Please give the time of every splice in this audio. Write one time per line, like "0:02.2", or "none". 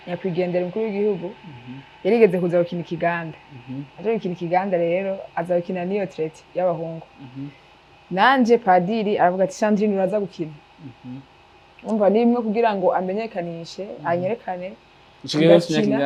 none